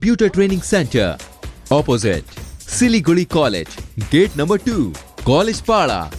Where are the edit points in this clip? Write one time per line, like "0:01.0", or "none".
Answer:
none